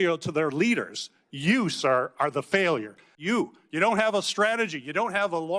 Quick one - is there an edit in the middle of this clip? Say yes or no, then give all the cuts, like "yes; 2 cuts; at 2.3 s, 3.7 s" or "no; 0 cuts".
yes; 1 cut; at 3.1 s